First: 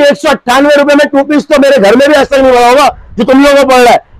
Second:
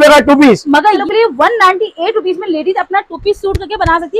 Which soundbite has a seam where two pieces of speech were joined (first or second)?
second